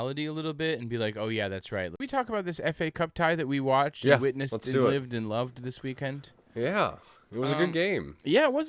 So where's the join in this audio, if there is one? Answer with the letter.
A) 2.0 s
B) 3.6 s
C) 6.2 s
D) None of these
A